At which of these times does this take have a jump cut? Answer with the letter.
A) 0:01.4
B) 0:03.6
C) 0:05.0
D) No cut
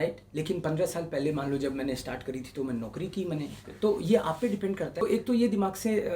C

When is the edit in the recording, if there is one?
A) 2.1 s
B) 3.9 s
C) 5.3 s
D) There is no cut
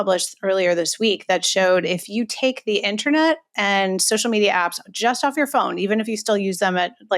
A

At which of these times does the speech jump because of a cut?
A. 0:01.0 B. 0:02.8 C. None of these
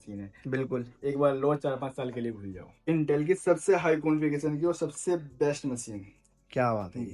B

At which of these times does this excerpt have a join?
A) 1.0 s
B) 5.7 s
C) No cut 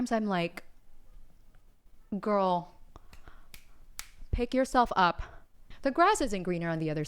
B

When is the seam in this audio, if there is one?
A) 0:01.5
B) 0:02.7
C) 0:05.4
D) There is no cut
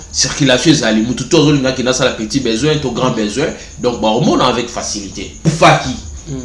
C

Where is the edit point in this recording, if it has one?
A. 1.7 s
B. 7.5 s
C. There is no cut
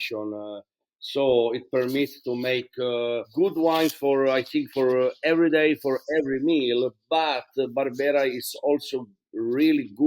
C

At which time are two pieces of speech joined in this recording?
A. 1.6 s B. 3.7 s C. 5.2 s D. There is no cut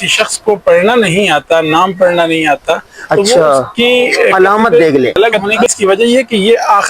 C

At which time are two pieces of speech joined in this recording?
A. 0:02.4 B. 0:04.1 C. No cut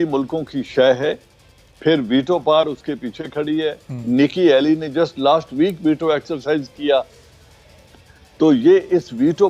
C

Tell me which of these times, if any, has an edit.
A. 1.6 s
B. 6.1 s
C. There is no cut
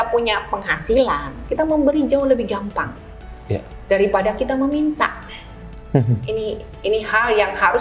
C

